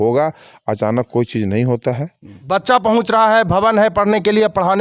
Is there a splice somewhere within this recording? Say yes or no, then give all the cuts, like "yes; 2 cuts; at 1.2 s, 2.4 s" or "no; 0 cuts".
yes; 1 cut; at 2.3 s